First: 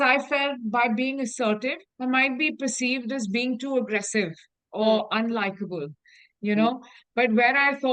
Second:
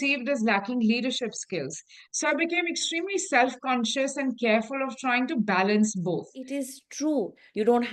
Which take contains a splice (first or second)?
second